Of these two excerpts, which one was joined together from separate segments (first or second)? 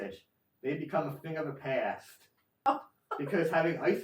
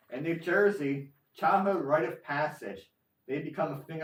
first